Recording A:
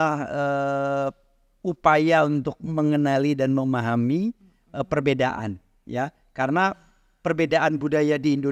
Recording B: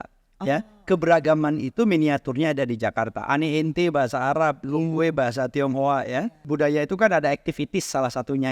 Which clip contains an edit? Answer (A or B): B